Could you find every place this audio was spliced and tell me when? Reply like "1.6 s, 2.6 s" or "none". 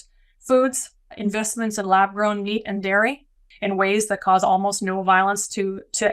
1.2 s, 3.5 s